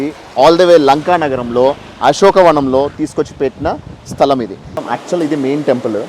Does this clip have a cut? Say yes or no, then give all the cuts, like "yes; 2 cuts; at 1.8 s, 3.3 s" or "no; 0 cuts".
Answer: yes; 1 cut; at 4.6 s